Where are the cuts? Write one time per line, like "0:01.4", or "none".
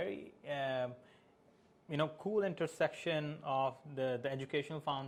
none